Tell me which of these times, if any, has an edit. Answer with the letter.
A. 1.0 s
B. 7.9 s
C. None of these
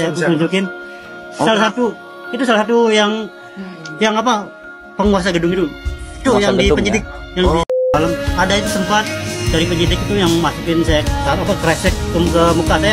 B